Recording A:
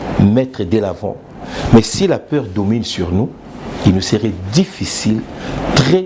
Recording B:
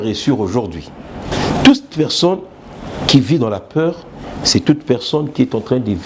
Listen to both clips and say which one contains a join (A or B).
B